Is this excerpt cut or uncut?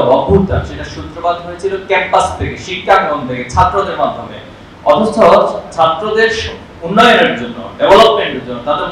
uncut